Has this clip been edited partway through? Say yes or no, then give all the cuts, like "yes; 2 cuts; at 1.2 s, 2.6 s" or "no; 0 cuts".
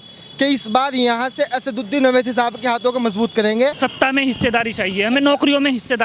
yes; 1 cut; at 3.8 s